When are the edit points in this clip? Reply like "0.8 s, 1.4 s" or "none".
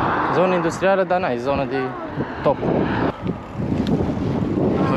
3.1 s